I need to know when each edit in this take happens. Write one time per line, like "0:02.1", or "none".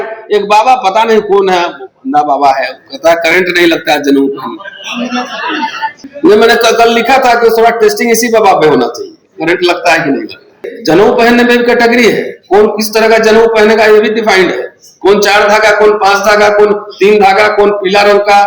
0:06.0
0:10.6